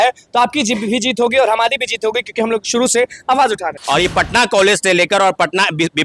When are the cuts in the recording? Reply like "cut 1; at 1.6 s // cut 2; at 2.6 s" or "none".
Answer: cut 1; at 3.8 s